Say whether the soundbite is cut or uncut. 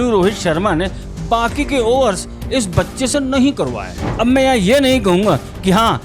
cut